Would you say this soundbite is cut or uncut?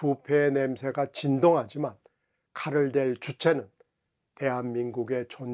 uncut